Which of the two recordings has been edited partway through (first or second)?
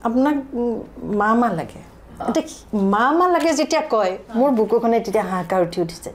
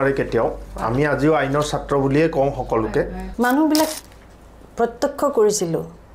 second